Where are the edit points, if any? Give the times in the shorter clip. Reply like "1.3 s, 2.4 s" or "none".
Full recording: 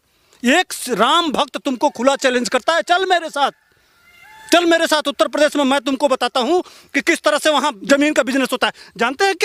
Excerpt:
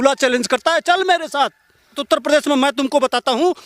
2.0 s